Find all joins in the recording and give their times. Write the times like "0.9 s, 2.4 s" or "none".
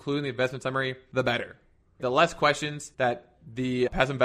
1.0 s, 2.8 s